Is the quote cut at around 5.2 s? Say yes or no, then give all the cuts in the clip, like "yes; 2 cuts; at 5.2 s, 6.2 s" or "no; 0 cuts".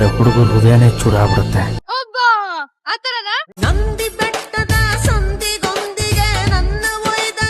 no; 1 cut; at 3.5 s